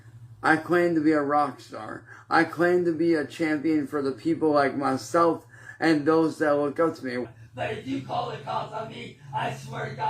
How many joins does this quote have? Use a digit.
1